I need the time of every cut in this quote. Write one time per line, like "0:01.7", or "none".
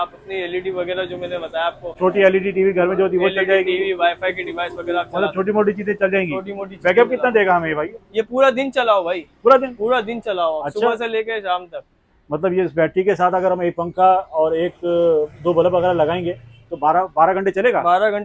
none